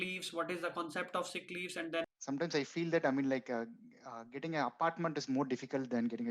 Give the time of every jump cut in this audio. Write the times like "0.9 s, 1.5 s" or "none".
2.1 s

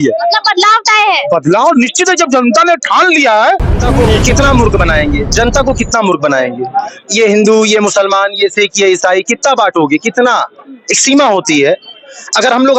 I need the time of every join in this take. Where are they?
3.9 s

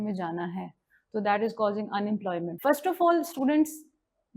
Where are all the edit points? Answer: 2.5 s

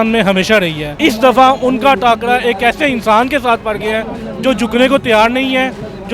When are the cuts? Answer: 0.9 s

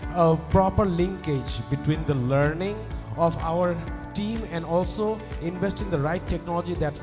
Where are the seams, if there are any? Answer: none

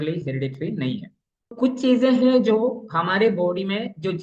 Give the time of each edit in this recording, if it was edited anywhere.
1.5 s

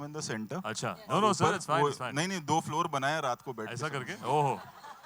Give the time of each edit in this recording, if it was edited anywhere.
none

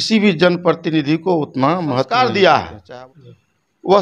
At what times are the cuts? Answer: 2.1 s

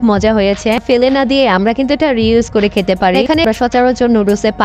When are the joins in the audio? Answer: 0.8 s, 3.4 s

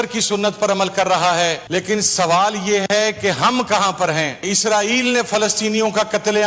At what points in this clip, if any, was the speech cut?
1.6 s, 4.5 s

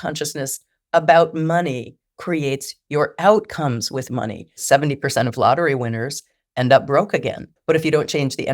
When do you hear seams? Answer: 4.6 s, 7.5 s

